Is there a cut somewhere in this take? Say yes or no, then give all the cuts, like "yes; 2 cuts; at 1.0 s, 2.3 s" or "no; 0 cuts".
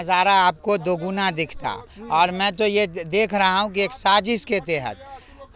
no; 0 cuts